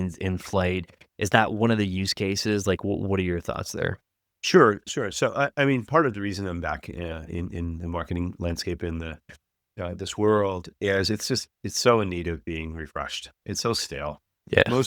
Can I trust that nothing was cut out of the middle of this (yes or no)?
yes